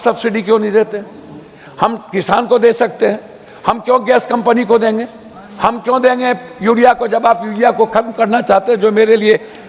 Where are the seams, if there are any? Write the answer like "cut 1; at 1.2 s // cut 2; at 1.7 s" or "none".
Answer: none